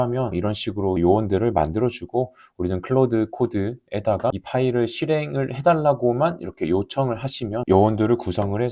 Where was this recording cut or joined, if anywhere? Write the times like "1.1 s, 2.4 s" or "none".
1.0 s, 7.7 s